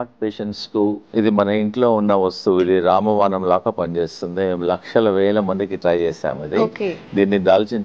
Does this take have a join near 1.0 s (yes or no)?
yes